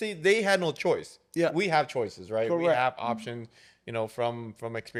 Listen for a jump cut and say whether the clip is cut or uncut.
uncut